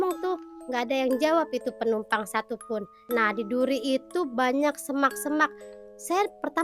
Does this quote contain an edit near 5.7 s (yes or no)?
no